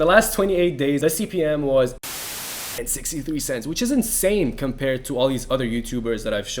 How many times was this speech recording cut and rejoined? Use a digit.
2